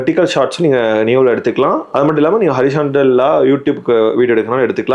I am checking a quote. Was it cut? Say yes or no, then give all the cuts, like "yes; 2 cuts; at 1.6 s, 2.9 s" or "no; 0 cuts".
no; 0 cuts